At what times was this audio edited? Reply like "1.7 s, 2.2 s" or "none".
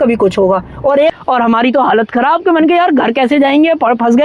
1.1 s